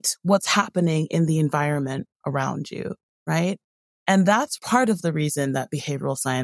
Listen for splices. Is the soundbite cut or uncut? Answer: cut